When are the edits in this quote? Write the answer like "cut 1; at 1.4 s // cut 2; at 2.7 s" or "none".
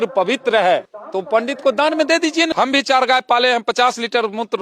cut 1; at 1.2 s // cut 2; at 2.5 s